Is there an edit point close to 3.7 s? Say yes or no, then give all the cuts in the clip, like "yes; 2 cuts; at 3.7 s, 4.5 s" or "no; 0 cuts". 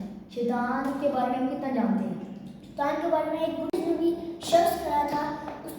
yes; 1 cut; at 3.7 s